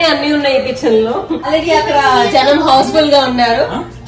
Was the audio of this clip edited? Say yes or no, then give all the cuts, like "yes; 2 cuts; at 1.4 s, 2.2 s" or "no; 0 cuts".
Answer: yes; 1 cut; at 1.5 s